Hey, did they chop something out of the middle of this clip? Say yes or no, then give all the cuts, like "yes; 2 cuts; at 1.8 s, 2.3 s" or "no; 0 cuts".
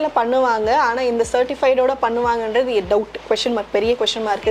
no; 0 cuts